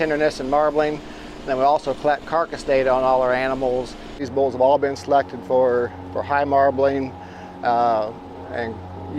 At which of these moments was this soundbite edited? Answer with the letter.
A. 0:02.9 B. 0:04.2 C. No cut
B